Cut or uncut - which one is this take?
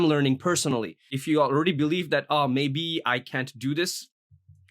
cut